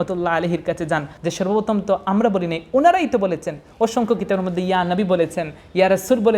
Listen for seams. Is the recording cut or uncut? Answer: cut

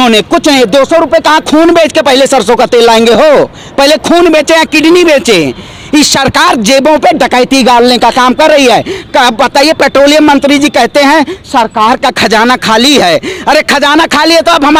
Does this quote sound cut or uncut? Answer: uncut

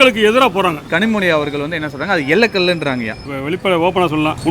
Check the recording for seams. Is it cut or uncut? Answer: cut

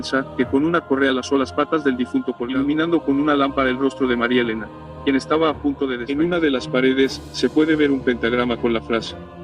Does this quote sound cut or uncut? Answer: cut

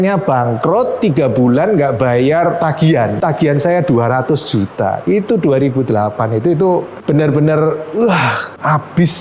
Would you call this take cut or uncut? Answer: uncut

